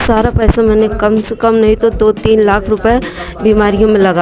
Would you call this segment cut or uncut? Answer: uncut